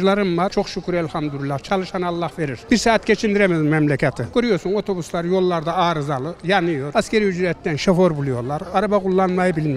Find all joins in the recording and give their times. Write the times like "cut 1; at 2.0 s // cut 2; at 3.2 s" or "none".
cut 1; at 2.6 s